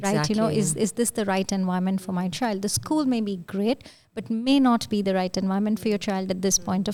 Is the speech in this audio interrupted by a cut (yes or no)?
no